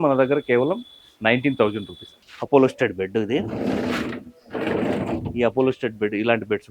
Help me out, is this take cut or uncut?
cut